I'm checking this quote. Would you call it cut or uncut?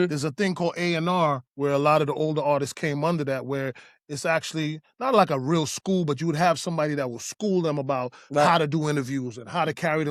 uncut